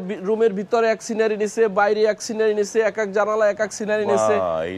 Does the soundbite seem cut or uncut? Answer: uncut